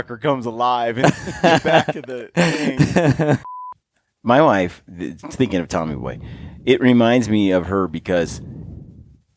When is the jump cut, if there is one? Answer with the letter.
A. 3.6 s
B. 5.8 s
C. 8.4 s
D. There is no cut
A